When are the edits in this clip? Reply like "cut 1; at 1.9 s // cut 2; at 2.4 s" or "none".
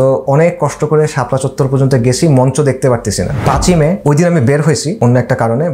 cut 1; at 3.7 s // cut 2; at 4.9 s